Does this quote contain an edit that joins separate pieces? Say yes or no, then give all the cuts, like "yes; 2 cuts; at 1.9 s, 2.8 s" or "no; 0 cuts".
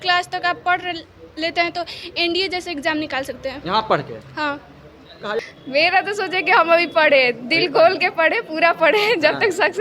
yes; 1 cut; at 5.4 s